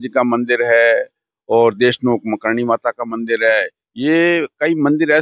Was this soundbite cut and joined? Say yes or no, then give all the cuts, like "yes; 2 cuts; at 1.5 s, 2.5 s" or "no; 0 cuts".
no; 0 cuts